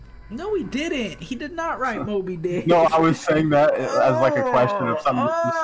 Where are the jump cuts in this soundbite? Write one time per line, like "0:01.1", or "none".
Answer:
none